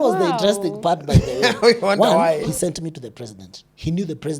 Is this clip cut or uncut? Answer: cut